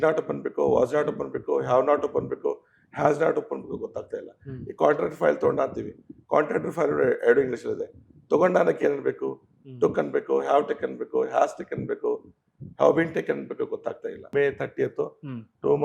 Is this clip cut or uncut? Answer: cut